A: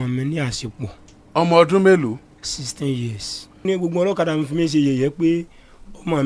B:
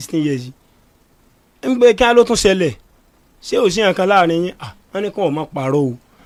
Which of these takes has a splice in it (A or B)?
A